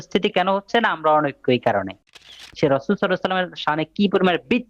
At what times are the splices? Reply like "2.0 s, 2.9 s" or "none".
2.2 s